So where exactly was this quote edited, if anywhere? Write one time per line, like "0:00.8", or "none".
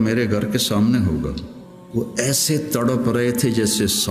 0:01.8